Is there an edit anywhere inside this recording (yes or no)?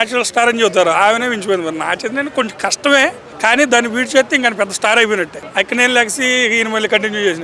yes